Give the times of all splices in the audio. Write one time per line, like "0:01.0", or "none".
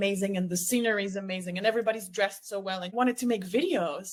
none